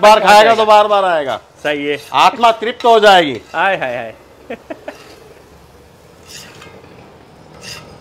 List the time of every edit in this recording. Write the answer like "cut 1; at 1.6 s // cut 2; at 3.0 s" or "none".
none